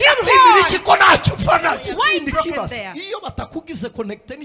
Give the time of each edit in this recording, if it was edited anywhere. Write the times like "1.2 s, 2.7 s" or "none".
1.9 s